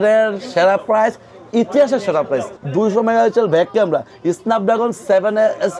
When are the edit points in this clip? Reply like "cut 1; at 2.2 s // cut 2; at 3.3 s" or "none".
cut 1; at 2.6 s